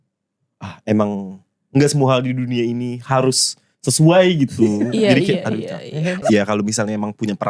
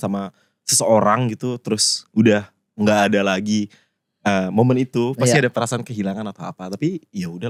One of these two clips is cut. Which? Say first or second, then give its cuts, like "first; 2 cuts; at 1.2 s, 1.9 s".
first; 1 cut; at 6.2 s